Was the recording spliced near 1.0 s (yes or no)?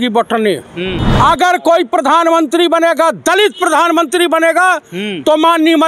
yes